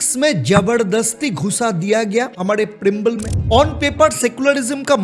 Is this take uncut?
no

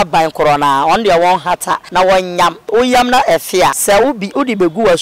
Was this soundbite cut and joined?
yes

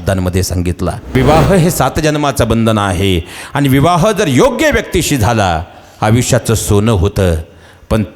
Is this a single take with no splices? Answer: no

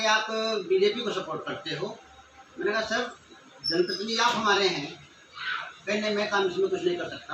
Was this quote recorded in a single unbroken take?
yes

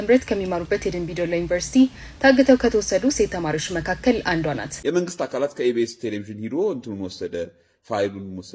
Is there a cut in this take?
yes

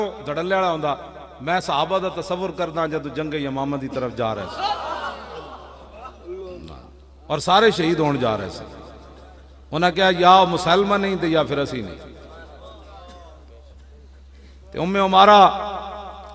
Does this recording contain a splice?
no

